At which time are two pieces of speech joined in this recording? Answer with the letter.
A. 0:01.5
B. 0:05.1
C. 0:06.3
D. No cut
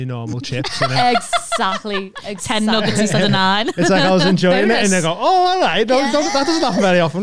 D